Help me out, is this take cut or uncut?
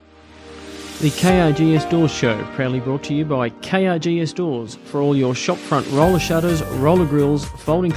cut